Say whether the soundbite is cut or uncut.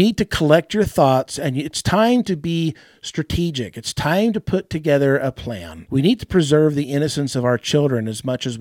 cut